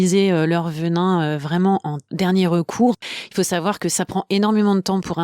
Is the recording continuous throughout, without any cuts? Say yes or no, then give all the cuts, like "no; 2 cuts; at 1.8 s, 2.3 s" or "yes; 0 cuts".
no; 1 cut; at 3.0 s